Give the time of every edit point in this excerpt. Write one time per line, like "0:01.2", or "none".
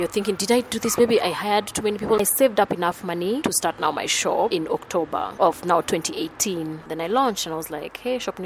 0:02.2
0:06.8